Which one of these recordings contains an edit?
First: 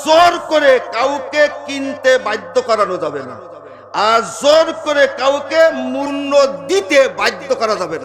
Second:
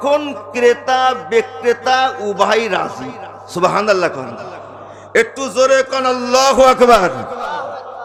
first; 1 cut; at 6.1 s

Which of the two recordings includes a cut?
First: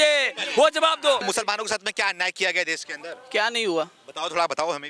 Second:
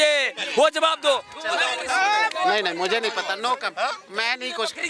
first; 1 cut; at 1.2 s

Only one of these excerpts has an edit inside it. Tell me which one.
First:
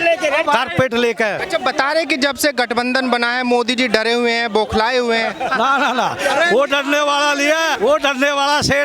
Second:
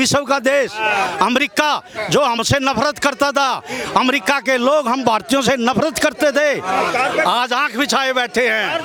first; 2 cuts; at 1.4 s, 7.7 s

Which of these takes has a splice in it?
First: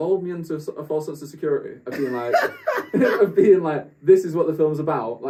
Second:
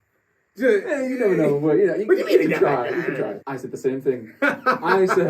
second; 1 cut; at 3.4 s

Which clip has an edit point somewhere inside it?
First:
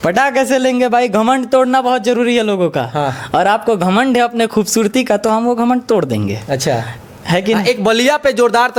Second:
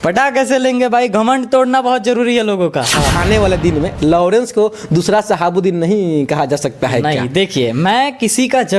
second; 1 cut; at 3.2 s

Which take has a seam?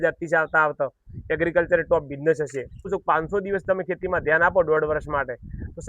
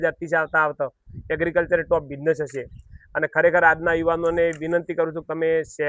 first; 1 cut; at 3.0 s

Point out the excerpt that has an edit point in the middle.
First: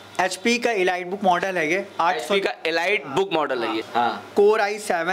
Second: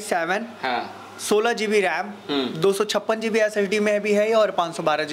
first; 1 cut; at 3.8 s

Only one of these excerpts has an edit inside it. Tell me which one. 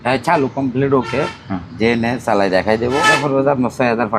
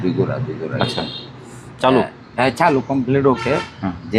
first; 1 cut; at 3.0 s

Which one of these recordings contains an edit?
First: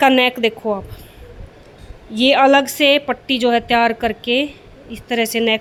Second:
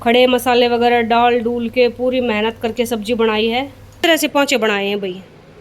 second; 1 cut; at 3.8 s

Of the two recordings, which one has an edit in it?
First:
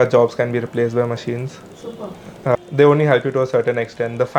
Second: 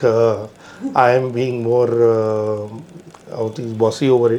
first; 1 cut; at 2.5 s

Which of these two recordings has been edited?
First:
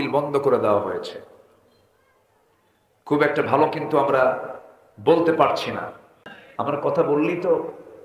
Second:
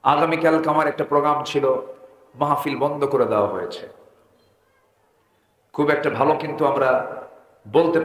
first; 1 cut; at 6.3 s

